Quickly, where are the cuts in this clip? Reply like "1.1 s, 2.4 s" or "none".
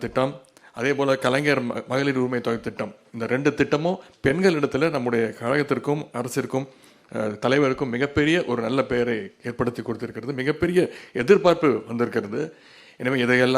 none